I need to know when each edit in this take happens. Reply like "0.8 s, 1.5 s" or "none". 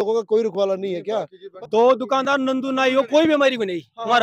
1.4 s